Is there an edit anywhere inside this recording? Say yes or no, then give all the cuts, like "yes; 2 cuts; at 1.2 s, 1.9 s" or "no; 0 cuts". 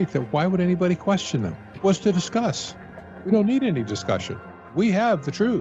yes; 2 cuts; at 1.7 s, 4.4 s